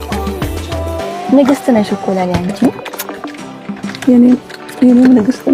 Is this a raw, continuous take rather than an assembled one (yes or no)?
no